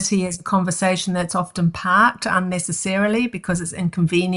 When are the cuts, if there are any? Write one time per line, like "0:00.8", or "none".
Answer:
none